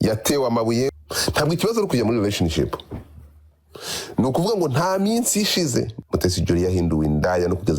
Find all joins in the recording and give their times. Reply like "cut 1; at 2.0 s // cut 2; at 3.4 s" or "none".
cut 1; at 0.9 s // cut 2; at 5.9 s